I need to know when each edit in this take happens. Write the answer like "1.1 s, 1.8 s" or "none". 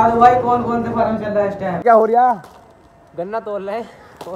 1.8 s